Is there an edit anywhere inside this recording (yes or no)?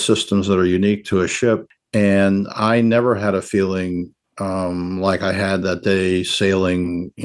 no